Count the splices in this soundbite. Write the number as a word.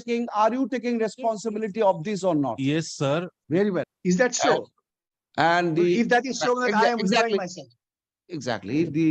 one